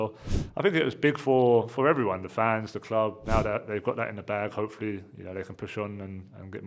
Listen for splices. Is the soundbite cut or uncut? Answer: cut